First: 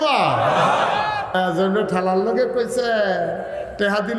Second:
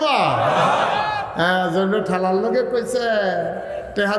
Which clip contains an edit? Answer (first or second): first